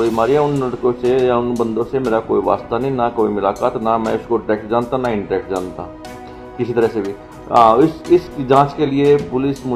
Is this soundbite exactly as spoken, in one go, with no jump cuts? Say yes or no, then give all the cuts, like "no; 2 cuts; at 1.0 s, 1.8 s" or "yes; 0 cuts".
yes; 0 cuts